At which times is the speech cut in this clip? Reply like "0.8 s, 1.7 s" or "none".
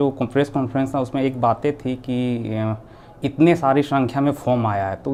none

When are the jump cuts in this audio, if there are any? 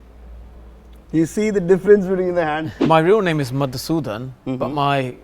2.8 s

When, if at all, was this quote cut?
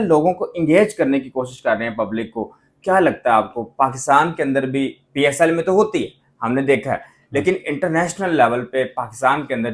none

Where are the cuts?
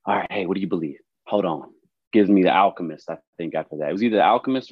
1.1 s

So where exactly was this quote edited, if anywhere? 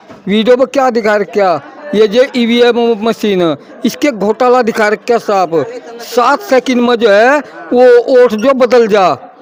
none

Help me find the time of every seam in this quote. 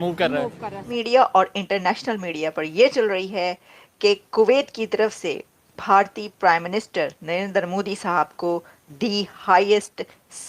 0.9 s

